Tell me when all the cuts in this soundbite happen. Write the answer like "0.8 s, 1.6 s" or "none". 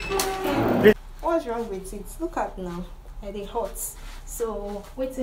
0.9 s